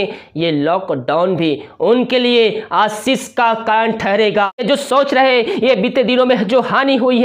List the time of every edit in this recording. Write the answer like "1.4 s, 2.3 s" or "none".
4.6 s